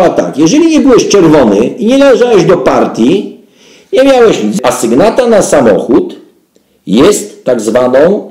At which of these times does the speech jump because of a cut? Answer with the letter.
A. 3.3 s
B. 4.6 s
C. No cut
B